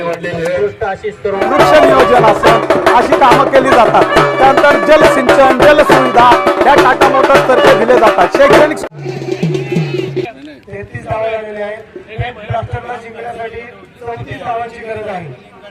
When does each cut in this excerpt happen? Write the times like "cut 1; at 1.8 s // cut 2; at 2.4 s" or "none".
cut 1; at 1.2 s // cut 2; at 8.8 s